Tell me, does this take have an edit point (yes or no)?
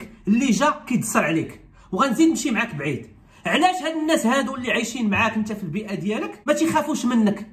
no